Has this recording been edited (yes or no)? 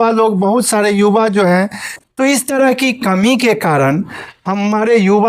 yes